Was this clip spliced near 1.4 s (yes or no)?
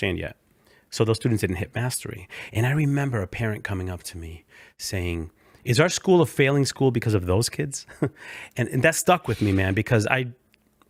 no